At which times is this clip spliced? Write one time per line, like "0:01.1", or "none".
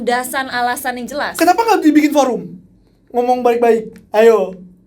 none

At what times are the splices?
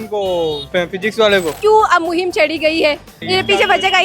0:01.5

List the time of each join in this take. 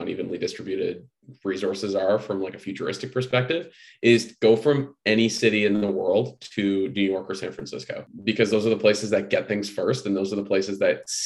0:08.1

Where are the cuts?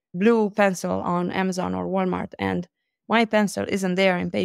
none

